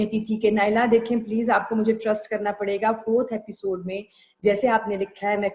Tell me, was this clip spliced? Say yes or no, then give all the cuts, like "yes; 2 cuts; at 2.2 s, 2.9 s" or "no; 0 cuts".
no; 0 cuts